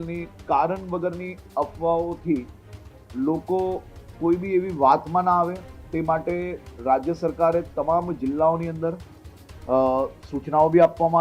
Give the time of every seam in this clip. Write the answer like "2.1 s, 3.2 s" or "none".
none